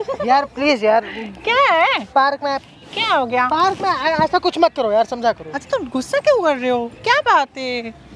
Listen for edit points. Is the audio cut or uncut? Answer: uncut